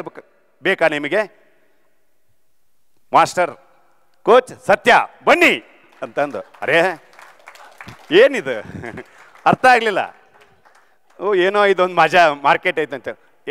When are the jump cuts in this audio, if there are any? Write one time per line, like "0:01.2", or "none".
none